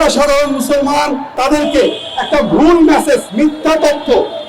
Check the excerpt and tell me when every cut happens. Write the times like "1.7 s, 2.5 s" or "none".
1.3 s, 3.3 s